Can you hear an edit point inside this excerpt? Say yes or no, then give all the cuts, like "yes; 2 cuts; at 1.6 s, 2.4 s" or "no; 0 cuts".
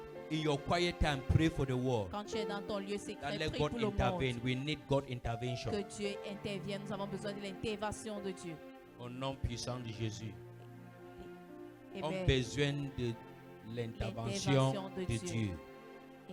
no; 0 cuts